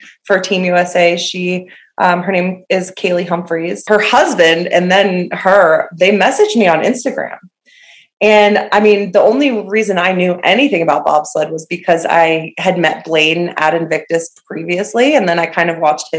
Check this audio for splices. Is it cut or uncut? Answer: cut